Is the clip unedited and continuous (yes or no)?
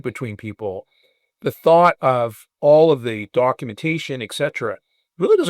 no